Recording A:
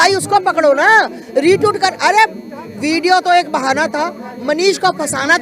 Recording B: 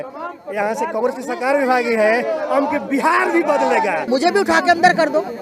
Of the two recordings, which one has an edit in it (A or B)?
B